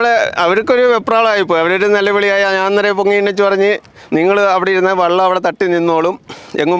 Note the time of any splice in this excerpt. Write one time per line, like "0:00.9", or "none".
none